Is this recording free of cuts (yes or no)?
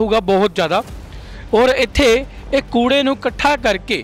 yes